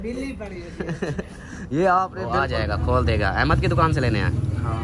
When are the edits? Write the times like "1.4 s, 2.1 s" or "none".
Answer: 2.3 s